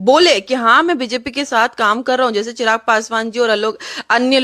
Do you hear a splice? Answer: no; 0 cuts

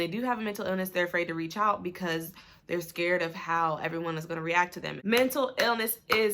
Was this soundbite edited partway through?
yes; 1 cut; at 4.7 s

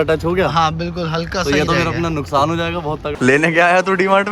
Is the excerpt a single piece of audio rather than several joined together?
no; 1 cut; at 3.1 s

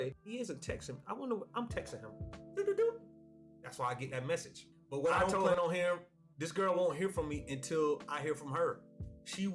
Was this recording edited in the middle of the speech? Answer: yes; 1 cut; at 5.5 s

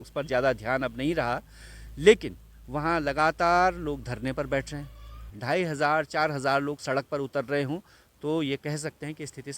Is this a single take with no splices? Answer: no; 1 cut; at 5.3 s

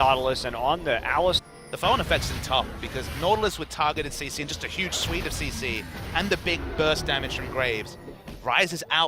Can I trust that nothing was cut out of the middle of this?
yes; 0 cuts

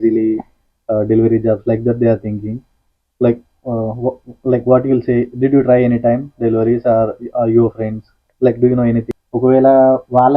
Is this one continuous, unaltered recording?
no; 1 cut; at 9.1 s

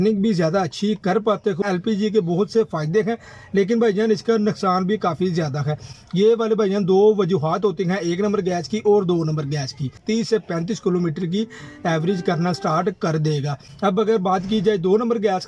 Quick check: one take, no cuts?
no; 4 cuts; at 1.6 s, 5.9 s, 10.0 s, 13.6 s

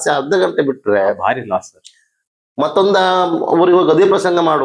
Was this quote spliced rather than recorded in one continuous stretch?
no; 0 cuts

